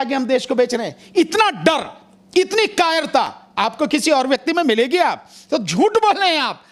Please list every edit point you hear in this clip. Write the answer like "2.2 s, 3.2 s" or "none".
none